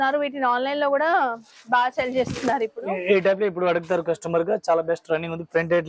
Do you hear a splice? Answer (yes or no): no